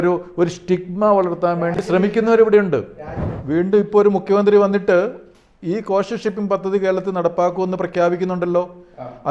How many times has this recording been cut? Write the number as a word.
one